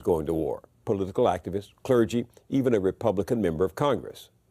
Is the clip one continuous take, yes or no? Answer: no